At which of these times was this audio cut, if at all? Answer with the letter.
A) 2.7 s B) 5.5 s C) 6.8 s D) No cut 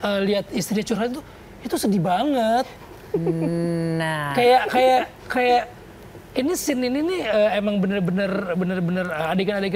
D